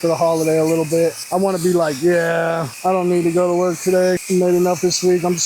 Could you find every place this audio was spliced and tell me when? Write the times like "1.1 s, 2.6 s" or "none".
1.2 s, 2.7 s, 4.2 s